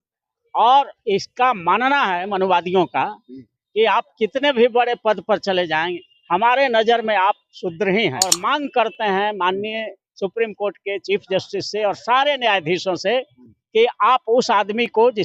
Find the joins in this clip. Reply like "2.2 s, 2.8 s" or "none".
8.4 s